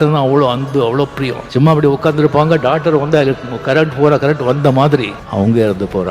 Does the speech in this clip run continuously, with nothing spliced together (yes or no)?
no